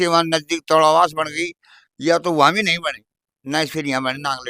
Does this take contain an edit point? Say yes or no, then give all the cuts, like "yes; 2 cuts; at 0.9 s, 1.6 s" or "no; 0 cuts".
no; 0 cuts